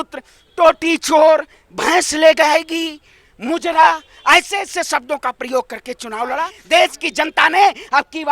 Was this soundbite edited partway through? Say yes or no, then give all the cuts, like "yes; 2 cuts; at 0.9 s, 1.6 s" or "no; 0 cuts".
yes; 1 cut; at 6.5 s